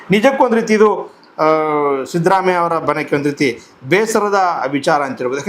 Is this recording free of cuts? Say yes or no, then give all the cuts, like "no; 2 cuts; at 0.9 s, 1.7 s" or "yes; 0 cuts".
yes; 0 cuts